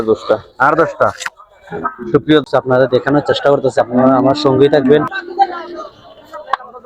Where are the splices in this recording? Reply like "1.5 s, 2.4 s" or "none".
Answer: 2.4 s